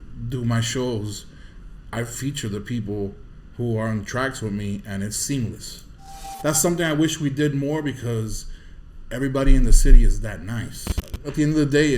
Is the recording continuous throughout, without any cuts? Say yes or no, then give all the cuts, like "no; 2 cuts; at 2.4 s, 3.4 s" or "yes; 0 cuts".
no; 2 cuts; at 6.3 s, 11.0 s